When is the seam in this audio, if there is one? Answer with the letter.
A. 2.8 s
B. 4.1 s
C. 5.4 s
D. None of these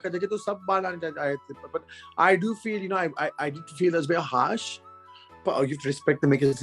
D